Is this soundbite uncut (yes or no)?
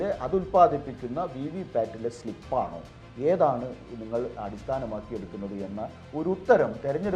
yes